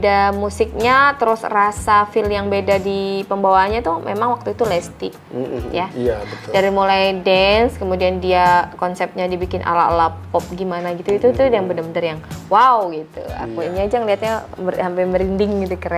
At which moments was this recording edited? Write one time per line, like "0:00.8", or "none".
none